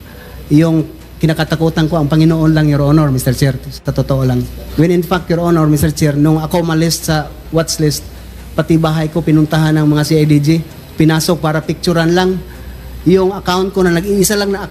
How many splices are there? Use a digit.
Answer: 1